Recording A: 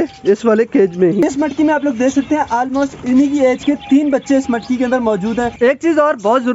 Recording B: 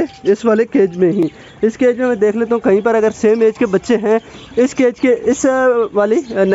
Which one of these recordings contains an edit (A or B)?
A